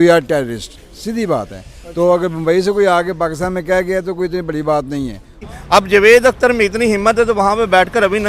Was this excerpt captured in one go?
no; 1 cut; at 5.4 s

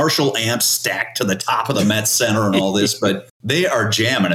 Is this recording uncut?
no; 1 cut; at 3.3 s

